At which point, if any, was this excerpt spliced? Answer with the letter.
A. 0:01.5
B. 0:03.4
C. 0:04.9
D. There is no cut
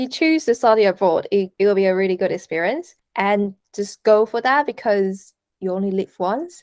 A